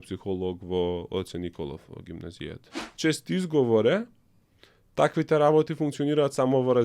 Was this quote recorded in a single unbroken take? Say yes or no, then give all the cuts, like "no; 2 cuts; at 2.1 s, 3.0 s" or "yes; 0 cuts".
no; 1 cut; at 2.8 s